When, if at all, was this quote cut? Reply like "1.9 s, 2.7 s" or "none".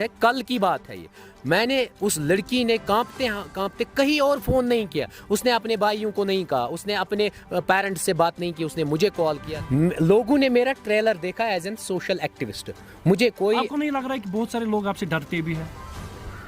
9.5 s